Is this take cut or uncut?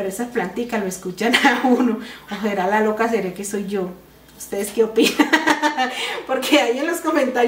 uncut